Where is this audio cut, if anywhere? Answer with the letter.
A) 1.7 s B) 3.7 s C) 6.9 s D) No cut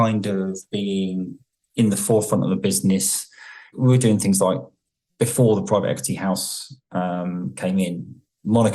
B